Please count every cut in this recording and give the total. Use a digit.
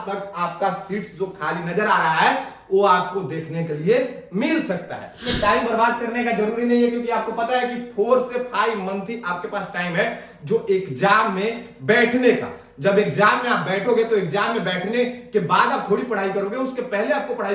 1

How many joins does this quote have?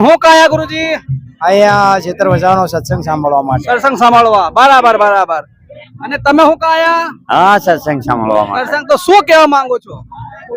0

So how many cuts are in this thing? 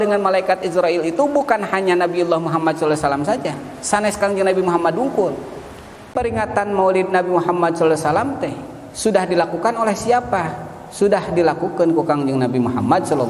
1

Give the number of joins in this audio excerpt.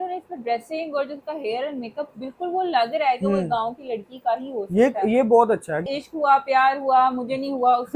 1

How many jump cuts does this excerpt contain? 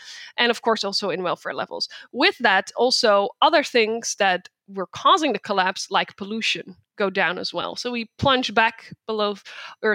0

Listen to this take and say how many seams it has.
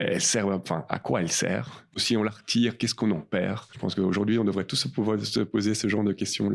1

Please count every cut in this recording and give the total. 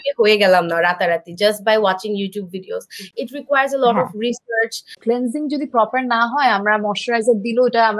1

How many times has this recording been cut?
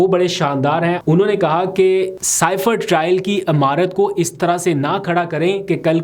2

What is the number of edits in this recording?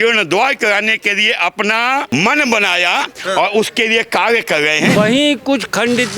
2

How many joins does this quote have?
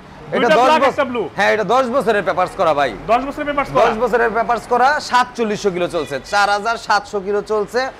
0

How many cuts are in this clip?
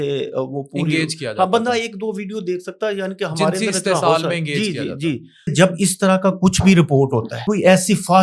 2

